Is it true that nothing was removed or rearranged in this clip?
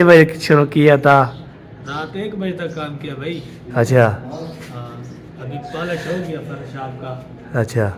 yes; 0 cuts

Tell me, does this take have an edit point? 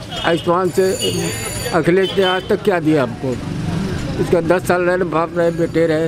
no; 0 cuts

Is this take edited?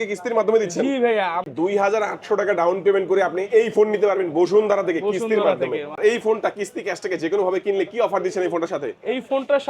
yes; 2 cuts; at 1.5 s, 5.9 s

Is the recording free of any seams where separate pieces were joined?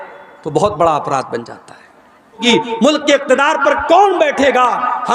no; 1 cut; at 2.4 s

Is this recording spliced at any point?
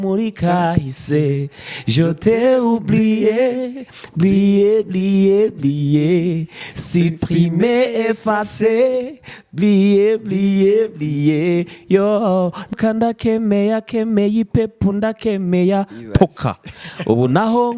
yes; 1 cut; at 12.7 s

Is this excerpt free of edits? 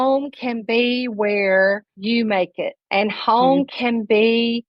no; 2 cuts; at 1.9 s, 2.8 s

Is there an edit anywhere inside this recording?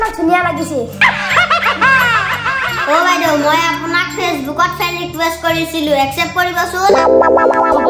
no; 0 cuts

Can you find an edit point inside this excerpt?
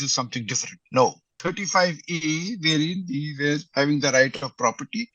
yes; 1 cut; at 1.4 s

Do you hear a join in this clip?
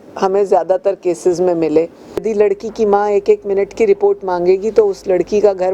yes; 1 cut; at 2.2 s

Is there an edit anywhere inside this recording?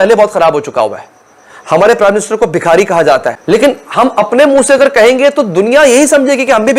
no; 0 cuts

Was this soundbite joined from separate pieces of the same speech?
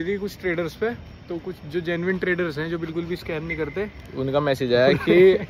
no; 0 cuts

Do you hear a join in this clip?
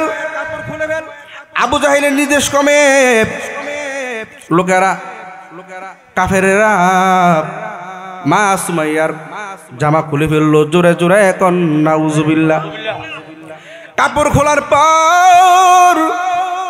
no; 0 cuts

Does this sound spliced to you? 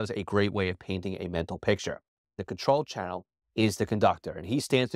yes; 1 cut; at 2.3 s

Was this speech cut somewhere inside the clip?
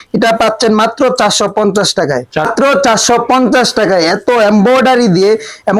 no; 0 cuts

